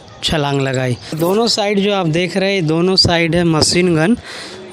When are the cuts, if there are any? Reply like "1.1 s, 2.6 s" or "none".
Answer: 1.2 s